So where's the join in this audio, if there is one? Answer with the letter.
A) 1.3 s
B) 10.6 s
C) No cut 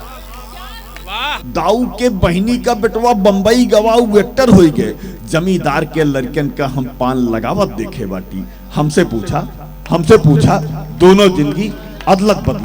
A